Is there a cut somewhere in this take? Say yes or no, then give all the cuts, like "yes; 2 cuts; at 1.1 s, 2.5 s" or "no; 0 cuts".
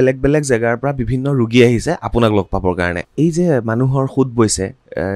yes; 1 cut; at 3.1 s